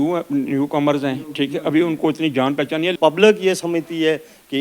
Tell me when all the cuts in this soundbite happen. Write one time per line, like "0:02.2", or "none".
0:02.9